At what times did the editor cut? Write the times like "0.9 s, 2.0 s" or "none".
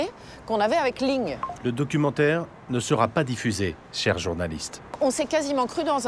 1.4 s, 3.9 s, 5.0 s

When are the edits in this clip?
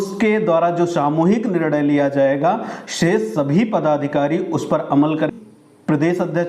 5.3 s

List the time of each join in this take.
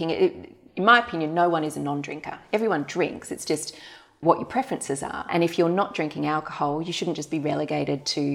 4.2 s, 5.3 s

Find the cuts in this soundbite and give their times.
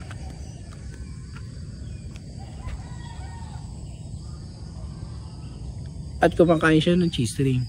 none

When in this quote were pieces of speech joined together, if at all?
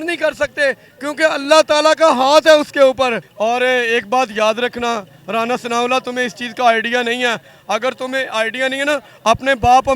3.3 s

